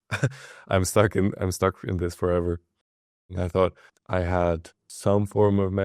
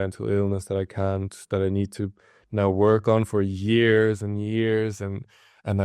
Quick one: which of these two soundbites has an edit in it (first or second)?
first